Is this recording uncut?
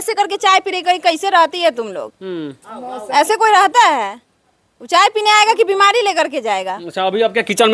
yes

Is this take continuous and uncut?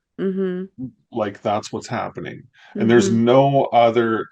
yes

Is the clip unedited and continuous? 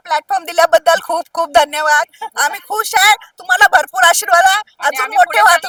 yes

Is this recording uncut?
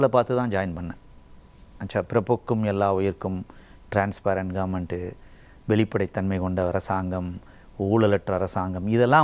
yes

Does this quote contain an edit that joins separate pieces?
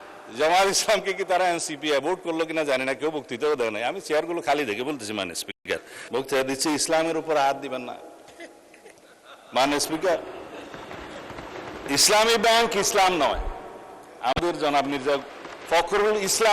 yes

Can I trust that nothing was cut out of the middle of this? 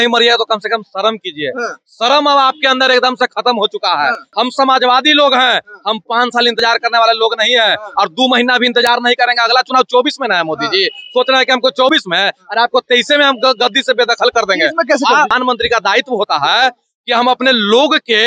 no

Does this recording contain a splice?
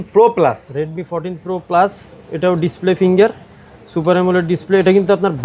no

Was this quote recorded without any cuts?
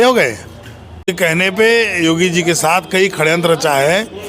no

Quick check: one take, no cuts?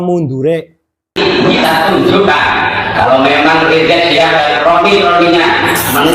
no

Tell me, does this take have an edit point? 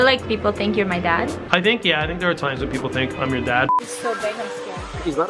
yes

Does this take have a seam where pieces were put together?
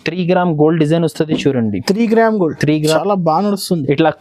yes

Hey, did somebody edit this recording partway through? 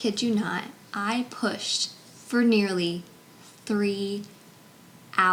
no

